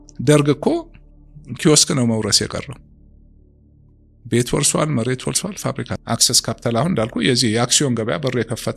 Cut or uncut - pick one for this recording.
cut